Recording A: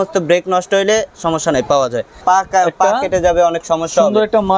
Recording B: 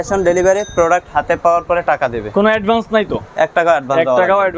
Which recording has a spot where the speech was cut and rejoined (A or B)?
A